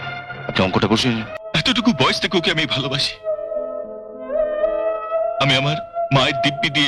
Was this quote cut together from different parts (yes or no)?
yes